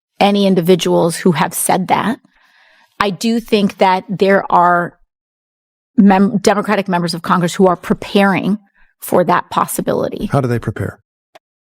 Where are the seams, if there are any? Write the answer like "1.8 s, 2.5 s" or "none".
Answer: 10.1 s